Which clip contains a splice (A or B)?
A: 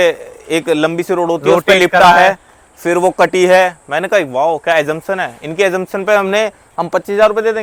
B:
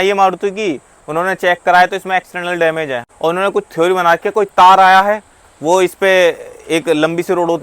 B